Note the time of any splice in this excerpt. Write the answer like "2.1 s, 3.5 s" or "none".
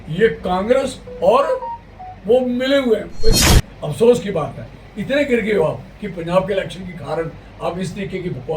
3.5 s